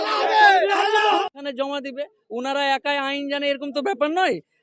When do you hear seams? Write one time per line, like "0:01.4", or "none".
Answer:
0:01.3